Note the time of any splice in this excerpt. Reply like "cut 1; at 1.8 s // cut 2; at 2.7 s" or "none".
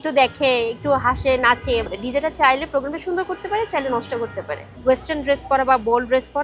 cut 1; at 1.8 s // cut 2; at 4.7 s